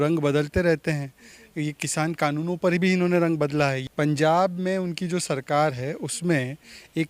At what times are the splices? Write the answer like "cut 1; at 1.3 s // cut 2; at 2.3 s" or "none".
cut 1; at 3.8 s

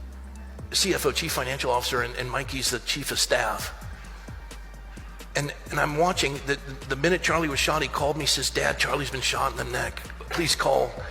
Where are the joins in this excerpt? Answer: cut 1; at 3.8 s // cut 2; at 5.3 s

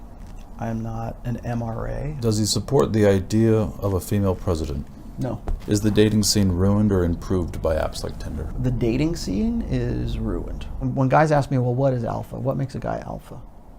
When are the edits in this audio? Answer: cut 1; at 2.2 s // cut 2; at 5.5 s // cut 3; at 8.6 s // cut 4; at 10.8 s

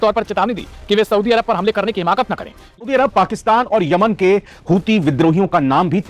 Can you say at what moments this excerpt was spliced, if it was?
cut 1; at 2.8 s

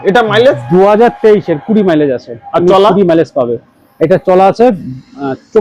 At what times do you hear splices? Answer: none

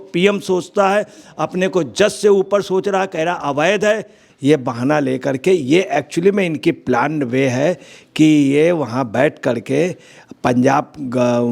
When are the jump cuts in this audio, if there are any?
cut 1; at 4.2 s

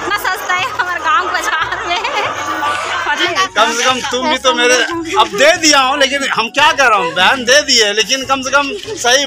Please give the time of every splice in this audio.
cut 1; at 3.2 s

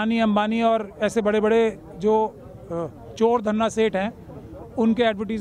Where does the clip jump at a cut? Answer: none

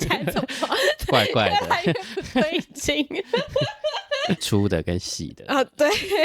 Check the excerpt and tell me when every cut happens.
cut 1; at 4.4 s

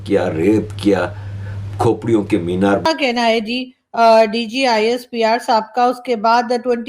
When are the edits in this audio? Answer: cut 1; at 2.9 s

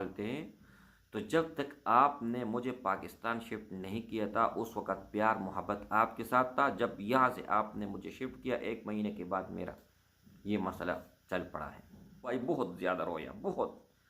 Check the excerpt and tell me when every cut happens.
cut 1; at 12.3 s

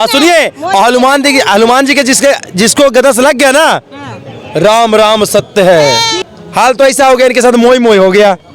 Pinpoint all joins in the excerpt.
cut 1; at 6.1 s

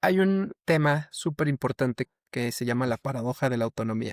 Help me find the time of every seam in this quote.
cut 1; at 2.1 s

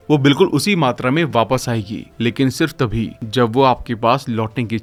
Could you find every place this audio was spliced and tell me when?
none

